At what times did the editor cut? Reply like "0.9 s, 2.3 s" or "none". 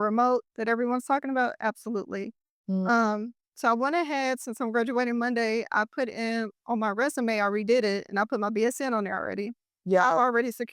none